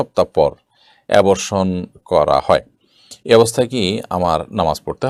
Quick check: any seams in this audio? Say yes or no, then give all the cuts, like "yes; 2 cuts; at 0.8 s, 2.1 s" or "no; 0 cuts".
no; 0 cuts